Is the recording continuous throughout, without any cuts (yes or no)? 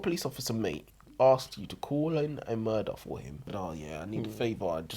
no